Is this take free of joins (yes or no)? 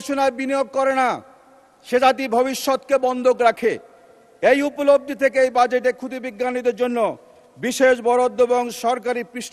yes